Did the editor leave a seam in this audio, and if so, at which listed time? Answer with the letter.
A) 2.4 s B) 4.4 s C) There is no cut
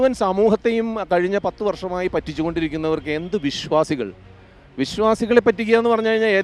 C